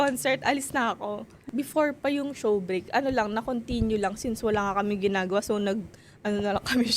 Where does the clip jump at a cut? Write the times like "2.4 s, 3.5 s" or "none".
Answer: 1.4 s

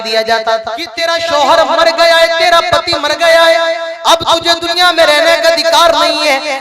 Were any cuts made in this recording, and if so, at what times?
0.9 s

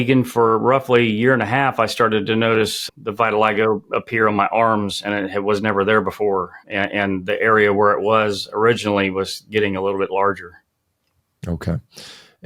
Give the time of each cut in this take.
none

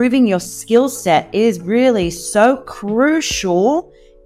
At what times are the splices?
none

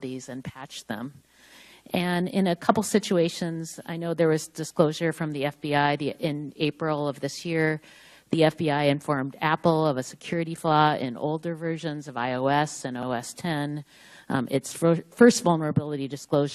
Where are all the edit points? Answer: 3.4 s

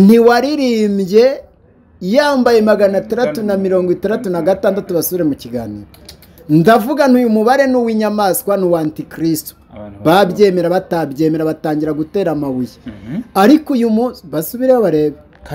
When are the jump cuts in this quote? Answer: none

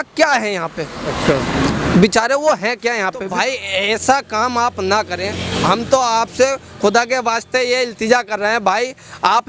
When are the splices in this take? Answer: 3.3 s

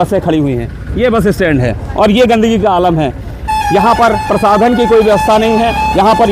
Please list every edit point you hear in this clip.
none

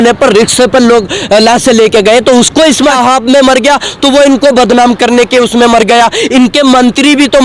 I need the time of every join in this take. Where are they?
2.9 s

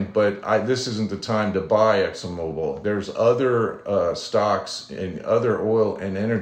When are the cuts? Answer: 2.8 s

